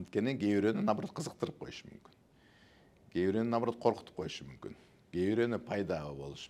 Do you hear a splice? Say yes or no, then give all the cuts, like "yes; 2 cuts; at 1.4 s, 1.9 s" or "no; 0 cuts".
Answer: no; 0 cuts